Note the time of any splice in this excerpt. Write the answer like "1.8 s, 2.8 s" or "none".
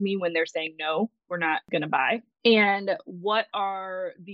2.2 s